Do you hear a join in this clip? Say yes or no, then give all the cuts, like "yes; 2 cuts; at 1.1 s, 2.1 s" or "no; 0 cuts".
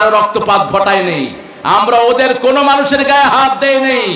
no; 0 cuts